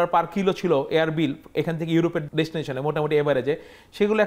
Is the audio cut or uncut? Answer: cut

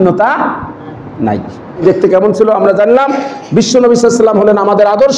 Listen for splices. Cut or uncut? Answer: cut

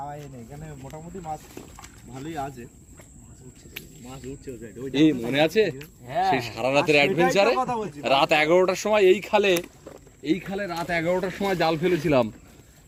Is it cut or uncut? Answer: uncut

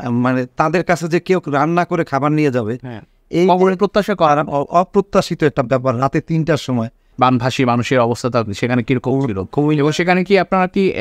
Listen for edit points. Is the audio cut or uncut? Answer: cut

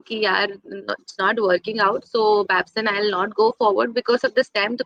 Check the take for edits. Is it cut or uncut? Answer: uncut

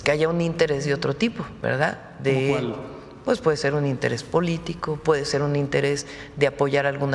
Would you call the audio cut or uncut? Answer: cut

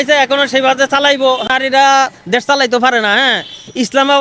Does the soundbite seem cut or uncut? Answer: cut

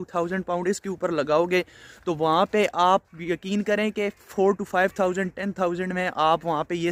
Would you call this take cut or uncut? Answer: uncut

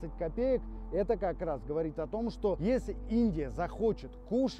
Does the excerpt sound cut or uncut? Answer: cut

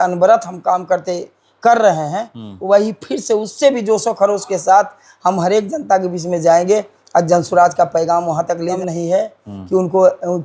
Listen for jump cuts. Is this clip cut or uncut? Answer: cut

